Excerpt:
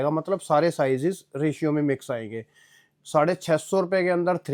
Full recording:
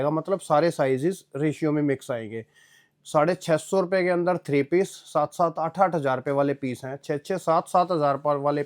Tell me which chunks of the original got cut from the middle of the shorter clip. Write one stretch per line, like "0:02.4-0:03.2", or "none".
none